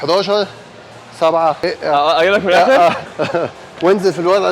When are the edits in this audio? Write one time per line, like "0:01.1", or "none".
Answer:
0:01.6
0:03.1